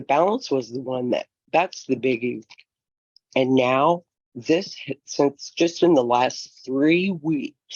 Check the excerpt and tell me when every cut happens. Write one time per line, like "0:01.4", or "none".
none

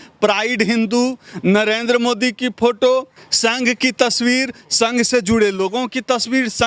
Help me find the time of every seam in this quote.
0:03.2

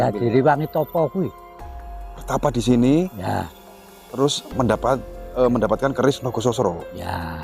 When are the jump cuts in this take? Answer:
none

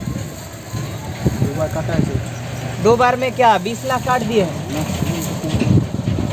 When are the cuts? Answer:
none

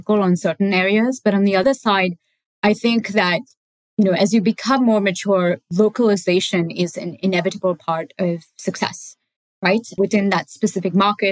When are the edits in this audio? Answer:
0:01.6
0:10.0

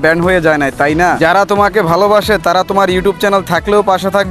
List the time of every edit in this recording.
0:01.2

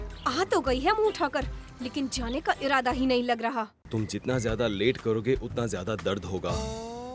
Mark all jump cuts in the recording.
0:03.8

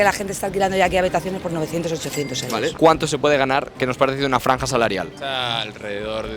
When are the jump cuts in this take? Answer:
0:02.7

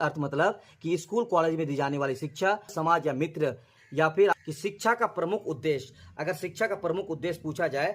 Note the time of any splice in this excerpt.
0:02.7
0:04.4

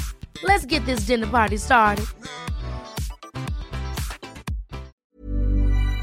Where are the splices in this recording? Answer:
0:05.0

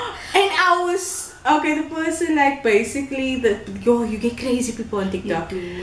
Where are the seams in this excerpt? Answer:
none

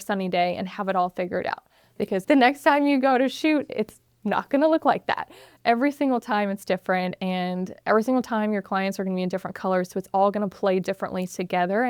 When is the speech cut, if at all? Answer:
0:02.2

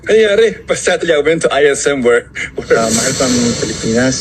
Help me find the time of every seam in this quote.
0:02.8

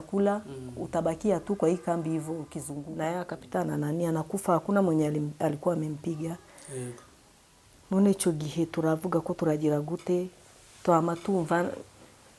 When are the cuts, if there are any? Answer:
0:02.9

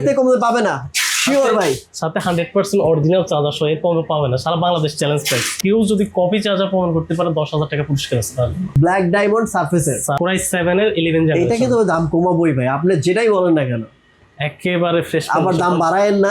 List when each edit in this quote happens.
0:05.6
0:08.7
0:10.2

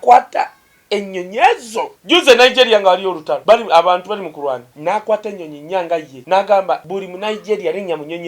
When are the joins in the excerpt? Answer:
0:02.0
0:03.3
0:04.7
0:06.1
0:06.9

